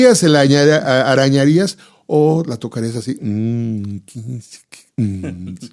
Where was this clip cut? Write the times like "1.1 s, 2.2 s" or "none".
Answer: none